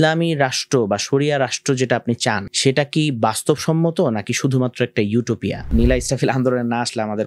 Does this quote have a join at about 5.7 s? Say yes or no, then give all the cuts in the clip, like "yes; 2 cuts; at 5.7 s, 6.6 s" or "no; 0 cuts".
yes; 2 cuts; at 2.5 s, 5.7 s